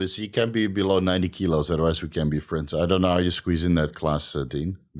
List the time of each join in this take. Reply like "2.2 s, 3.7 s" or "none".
2.7 s